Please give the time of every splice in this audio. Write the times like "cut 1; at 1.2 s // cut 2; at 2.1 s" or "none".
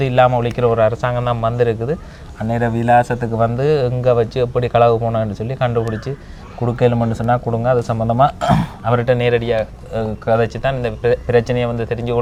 none